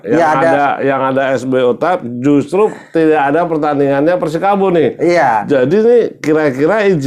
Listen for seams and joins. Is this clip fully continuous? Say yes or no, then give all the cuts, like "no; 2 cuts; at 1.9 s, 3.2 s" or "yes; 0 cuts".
yes; 0 cuts